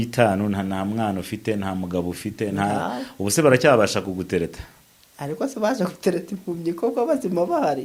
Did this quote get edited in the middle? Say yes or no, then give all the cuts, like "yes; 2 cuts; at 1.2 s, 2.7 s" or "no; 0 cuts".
no; 0 cuts